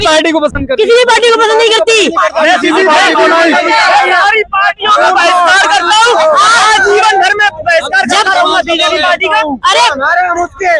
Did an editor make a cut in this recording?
no; 0 cuts

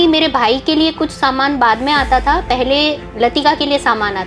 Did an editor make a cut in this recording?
no; 0 cuts

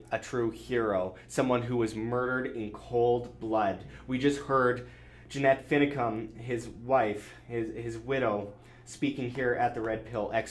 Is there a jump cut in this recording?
no; 0 cuts

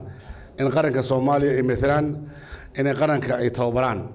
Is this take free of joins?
yes; 0 cuts

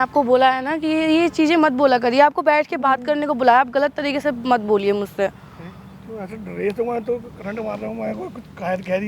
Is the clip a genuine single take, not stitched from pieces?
yes; 0 cuts

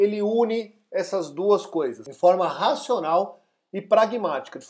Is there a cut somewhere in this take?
yes; 1 cut; at 2.0 s

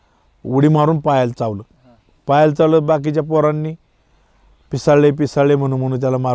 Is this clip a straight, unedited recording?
yes; 0 cuts

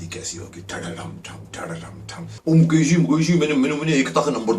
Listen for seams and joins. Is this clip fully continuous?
no; 1 cut; at 2.3 s

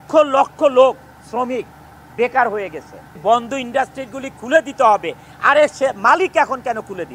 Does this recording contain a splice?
yes; 1 cut; at 3.2 s

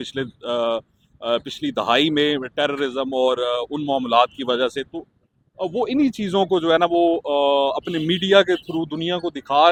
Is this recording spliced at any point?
no; 0 cuts

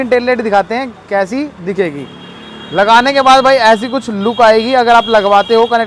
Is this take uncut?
yes; 0 cuts

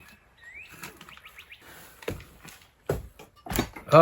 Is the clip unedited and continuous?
no; 1 cut; at 1.6 s

